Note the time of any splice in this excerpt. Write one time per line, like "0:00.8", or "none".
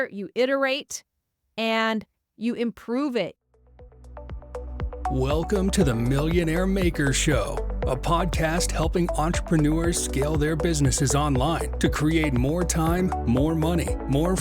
0:03.3